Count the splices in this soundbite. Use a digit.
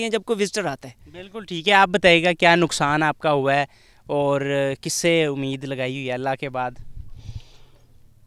0